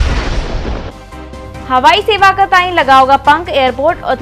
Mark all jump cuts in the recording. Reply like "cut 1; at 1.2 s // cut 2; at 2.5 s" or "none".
cut 1; at 1.3 s